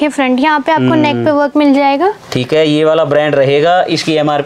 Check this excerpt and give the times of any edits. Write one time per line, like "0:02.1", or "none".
none